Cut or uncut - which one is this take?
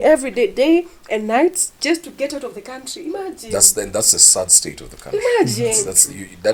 uncut